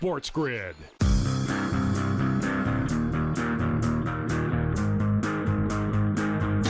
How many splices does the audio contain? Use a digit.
1